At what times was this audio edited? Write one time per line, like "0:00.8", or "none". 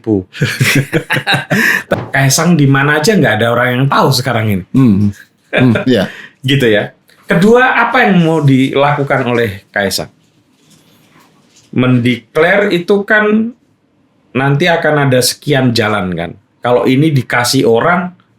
0:01.9